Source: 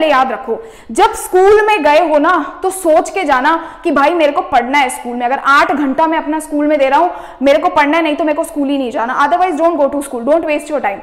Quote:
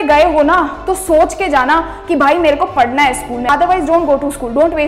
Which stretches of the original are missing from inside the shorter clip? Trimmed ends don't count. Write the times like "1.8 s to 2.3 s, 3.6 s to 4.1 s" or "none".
5.2 s to 9.2 s